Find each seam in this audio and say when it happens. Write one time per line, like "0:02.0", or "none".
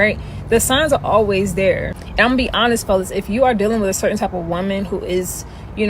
0:04.1